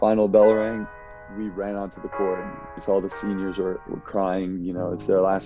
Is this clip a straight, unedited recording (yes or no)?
no